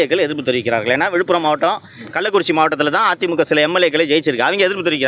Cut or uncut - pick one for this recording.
uncut